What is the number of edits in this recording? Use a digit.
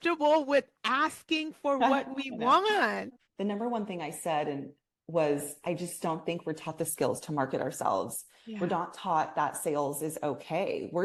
0